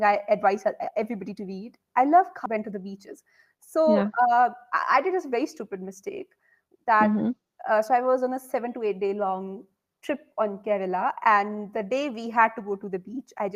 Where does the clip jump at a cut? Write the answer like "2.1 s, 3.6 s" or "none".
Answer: 2.4 s